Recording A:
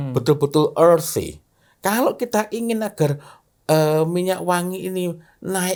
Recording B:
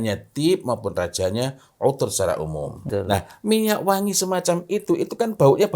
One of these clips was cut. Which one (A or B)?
B